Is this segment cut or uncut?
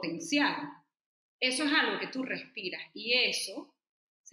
uncut